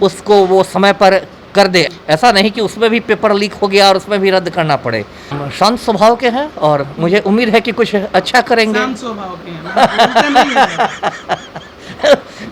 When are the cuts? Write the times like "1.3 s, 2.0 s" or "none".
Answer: 1.9 s, 5.4 s